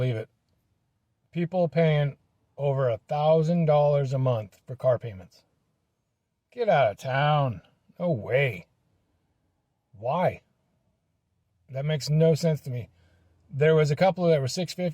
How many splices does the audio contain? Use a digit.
0